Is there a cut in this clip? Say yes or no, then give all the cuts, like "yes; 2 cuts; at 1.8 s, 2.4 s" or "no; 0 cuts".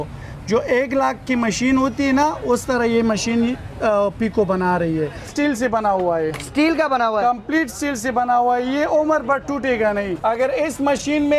yes; 2 cuts; at 5.3 s, 10.1 s